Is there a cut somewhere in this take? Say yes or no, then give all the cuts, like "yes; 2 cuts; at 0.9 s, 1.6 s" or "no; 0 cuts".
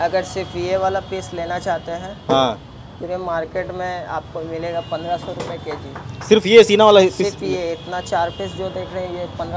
no; 0 cuts